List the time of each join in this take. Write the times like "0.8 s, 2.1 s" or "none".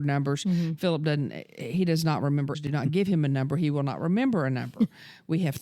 2.6 s